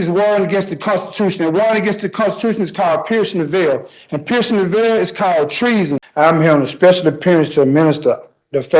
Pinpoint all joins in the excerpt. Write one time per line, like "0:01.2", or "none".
0:05.6